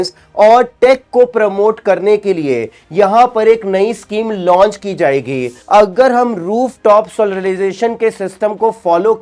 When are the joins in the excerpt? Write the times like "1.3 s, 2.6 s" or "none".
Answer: 5.6 s